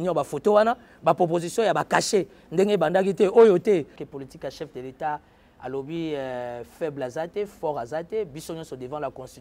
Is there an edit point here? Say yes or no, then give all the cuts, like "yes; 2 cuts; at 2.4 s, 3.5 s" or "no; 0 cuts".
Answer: yes; 1 cut; at 4.0 s